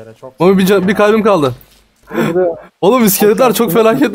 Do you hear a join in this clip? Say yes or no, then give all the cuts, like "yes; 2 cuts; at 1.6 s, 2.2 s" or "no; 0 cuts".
yes; 1 cut; at 2.0 s